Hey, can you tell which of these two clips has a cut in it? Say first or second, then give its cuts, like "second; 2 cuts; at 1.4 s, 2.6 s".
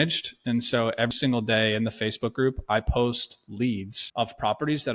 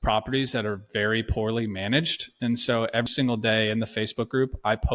first; 1 cut; at 4.0 s